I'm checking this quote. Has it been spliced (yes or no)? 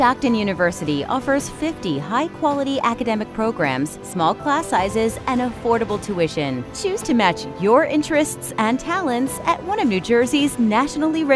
no